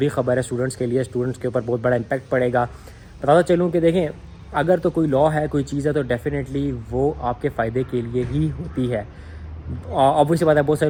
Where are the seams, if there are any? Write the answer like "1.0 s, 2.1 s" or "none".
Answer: none